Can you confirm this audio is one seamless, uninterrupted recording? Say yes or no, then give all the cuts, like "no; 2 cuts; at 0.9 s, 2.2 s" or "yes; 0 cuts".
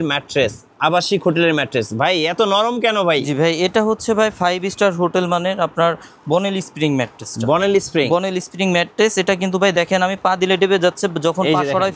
yes; 0 cuts